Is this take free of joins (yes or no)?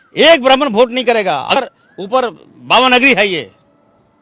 no